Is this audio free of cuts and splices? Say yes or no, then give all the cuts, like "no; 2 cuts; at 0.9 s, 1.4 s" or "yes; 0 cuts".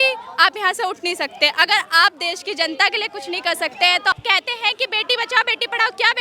no; 1 cut; at 4.1 s